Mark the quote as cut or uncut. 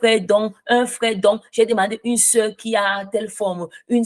uncut